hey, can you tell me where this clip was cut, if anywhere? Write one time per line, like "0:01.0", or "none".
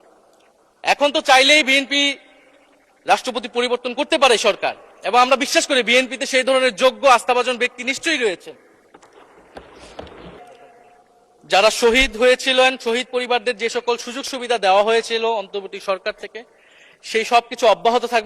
0:10.4